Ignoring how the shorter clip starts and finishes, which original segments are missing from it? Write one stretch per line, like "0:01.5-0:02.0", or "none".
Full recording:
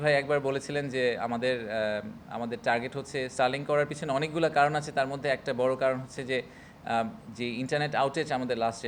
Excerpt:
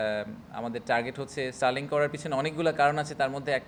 none

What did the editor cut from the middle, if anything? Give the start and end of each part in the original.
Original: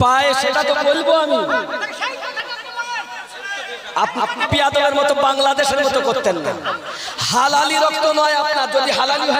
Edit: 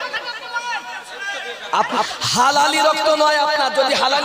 0:04.3-0:07.1

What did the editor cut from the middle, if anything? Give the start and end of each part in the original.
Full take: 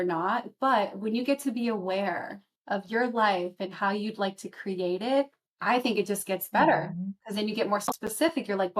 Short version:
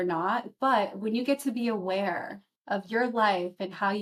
none

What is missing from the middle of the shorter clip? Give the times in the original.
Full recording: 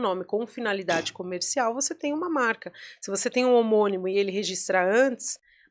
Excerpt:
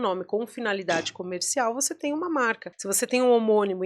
0:02.7-0:02.9

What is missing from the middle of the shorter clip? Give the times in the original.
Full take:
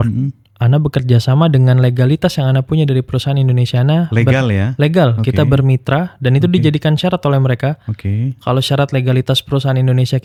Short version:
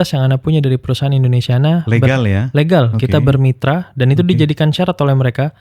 none

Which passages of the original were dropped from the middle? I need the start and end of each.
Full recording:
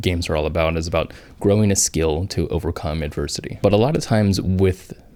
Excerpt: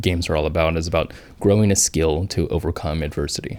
none

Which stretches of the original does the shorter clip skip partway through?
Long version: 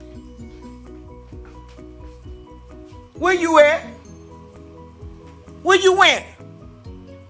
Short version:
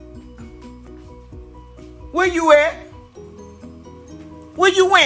0:02.1-0:03.2

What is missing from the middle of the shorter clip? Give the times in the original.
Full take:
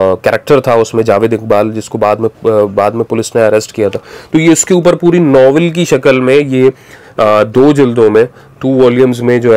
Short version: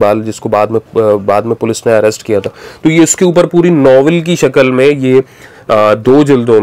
none

